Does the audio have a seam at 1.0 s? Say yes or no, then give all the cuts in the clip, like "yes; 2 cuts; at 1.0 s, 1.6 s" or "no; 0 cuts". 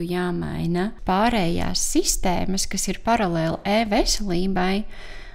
yes; 1 cut; at 1.0 s